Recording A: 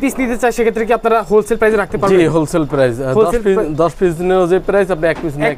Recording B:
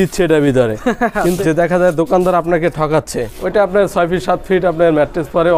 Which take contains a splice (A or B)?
B